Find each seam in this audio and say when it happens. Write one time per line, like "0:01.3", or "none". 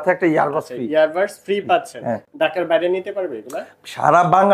none